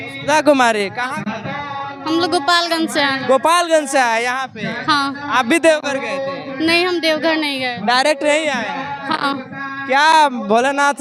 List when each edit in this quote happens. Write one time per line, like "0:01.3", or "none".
none